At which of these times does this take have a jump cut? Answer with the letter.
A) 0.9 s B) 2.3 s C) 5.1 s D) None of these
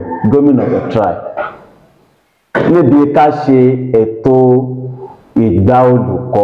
D